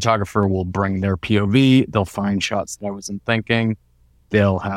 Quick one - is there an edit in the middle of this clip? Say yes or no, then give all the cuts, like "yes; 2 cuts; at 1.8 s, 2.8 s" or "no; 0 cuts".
no; 0 cuts